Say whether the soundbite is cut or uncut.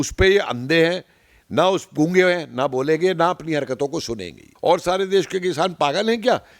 cut